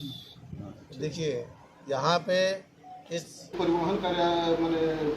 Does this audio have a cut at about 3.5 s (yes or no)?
yes